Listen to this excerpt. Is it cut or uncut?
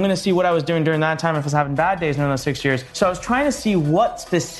cut